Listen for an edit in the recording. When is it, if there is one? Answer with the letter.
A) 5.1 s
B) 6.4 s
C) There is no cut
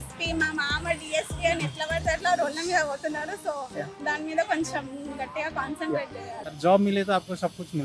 B